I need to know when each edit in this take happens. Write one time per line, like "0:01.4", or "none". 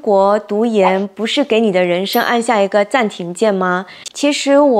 0:03.9